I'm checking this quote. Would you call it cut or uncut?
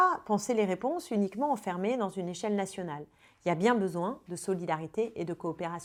uncut